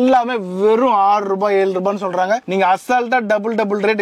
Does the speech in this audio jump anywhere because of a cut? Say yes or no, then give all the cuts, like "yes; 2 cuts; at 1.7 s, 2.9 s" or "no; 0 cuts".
no; 0 cuts